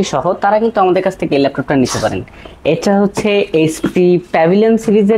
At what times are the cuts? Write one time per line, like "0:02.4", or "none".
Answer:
none